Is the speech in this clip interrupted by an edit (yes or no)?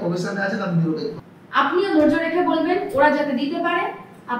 yes